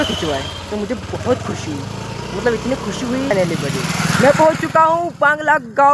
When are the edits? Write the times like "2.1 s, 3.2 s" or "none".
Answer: 3.3 s